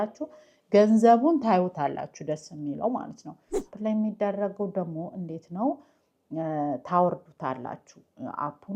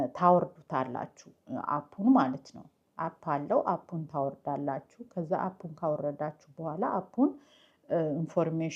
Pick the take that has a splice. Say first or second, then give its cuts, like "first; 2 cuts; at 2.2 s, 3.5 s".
first; 1 cut; at 3.7 s